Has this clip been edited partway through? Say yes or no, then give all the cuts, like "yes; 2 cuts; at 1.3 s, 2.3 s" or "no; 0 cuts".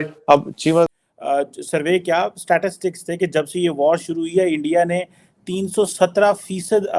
yes; 1 cut; at 1.0 s